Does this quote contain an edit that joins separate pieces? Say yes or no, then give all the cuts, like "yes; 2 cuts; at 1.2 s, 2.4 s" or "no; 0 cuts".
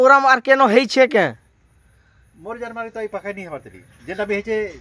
no; 0 cuts